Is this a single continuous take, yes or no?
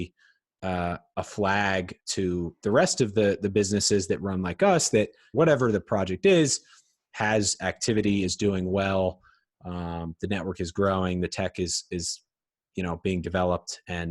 no